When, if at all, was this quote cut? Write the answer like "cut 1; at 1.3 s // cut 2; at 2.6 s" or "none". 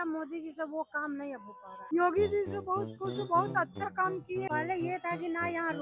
cut 1; at 1.7 s // cut 2; at 4.5 s